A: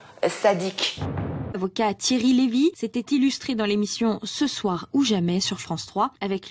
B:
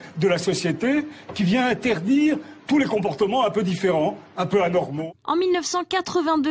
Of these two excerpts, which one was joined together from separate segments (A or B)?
A